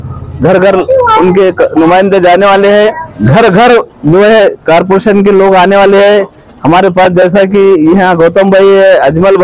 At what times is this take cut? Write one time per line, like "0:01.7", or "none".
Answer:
0:03.1